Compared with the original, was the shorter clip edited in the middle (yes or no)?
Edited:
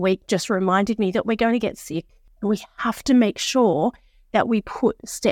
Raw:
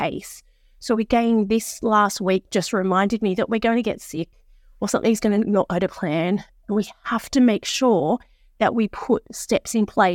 yes